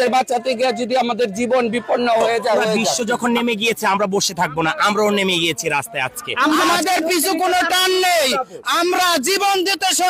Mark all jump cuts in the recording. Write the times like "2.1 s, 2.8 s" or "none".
2.9 s, 6.6 s